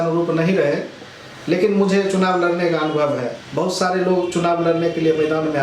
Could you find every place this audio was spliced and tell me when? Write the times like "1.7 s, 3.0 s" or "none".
3.4 s